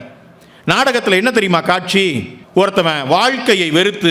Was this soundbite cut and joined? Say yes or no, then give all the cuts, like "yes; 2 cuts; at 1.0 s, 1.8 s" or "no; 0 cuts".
yes; 1 cut; at 2.3 s